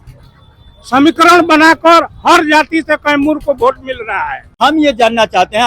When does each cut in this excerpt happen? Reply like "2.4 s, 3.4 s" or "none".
4.5 s